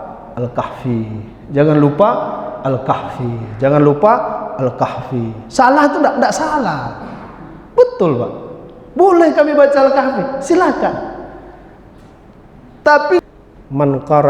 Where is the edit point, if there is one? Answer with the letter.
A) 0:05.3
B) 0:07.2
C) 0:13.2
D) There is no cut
C